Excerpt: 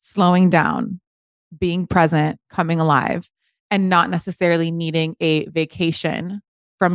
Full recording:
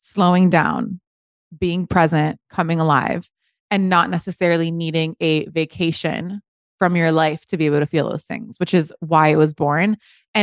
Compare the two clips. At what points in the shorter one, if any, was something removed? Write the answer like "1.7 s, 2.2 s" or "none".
none